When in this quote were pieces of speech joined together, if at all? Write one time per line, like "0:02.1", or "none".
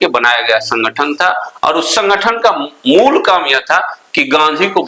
none